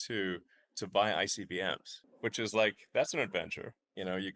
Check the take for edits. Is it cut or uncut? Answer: uncut